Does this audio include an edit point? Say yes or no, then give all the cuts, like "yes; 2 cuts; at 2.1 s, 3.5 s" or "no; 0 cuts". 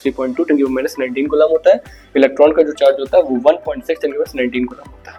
no; 0 cuts